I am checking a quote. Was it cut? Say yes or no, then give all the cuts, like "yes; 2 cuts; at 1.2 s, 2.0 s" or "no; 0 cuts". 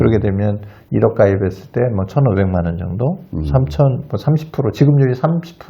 no; 0 cuts